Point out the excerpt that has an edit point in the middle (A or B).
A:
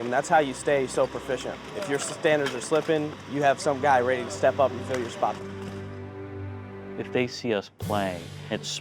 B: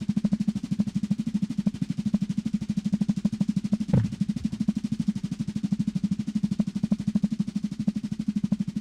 A